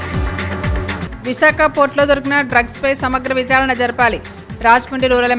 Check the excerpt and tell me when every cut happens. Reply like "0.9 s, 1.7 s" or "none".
1.0 s